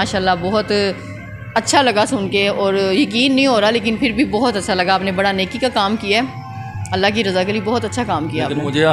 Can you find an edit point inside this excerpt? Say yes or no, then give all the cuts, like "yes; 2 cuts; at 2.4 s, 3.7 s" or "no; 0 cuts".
no; 0 cuts